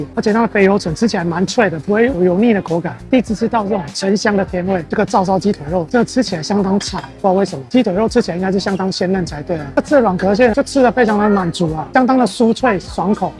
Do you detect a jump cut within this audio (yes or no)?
yes